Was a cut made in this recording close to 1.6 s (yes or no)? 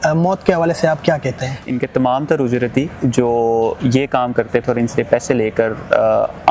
yes